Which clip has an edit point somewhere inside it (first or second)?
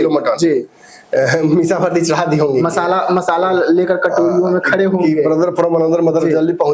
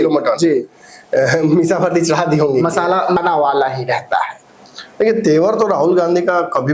second